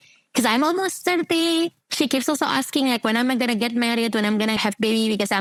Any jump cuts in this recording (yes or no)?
no